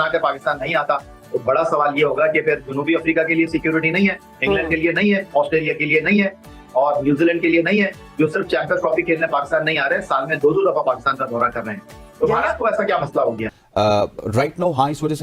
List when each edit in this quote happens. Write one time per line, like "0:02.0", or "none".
0:13.5